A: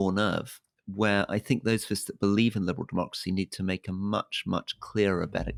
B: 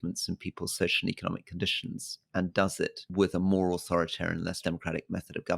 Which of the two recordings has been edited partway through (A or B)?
B